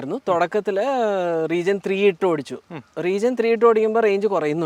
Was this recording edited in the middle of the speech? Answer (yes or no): no